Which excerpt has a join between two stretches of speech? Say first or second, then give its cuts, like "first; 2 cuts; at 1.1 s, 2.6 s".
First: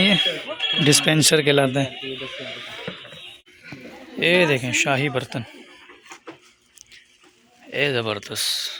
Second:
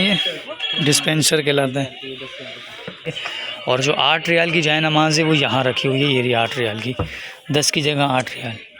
second; 1 cut; at 3.2 s